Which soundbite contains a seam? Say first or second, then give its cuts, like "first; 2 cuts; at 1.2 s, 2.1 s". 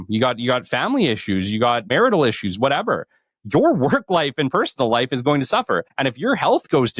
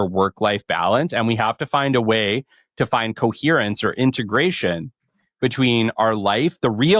first; 2 cuts; at 1.9 s, 5.9 s